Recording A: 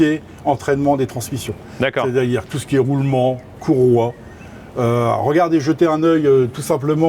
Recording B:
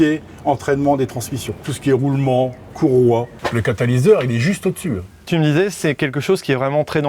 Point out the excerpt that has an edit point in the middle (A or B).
B